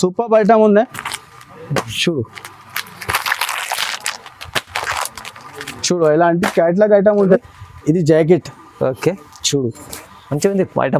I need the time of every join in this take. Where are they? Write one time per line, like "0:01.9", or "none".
0:07.4